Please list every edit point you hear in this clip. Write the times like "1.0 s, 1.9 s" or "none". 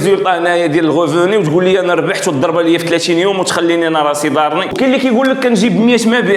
4.7 s